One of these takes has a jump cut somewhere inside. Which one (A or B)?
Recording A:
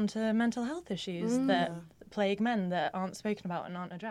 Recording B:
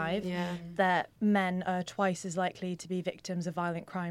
B